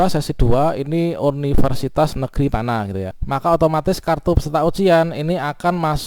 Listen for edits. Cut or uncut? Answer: cut